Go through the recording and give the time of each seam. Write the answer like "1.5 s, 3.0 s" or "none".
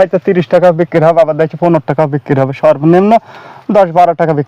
none